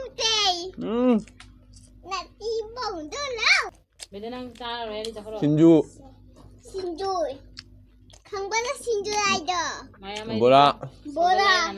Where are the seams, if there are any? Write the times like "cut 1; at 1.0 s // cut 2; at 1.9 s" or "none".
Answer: cut 1; at 3.7 s